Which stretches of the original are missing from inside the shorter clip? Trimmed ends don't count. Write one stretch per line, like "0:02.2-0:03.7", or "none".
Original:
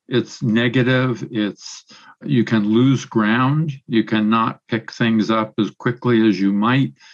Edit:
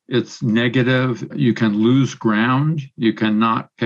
0:01.2-0:02.1